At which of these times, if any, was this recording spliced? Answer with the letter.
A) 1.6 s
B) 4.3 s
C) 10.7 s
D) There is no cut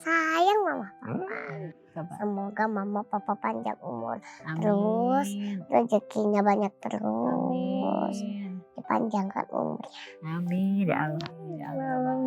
A